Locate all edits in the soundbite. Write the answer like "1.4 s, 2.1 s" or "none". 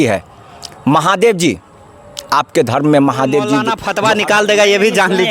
3.8 s